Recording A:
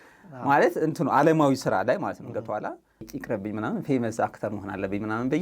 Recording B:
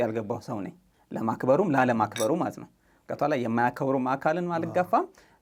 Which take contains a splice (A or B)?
A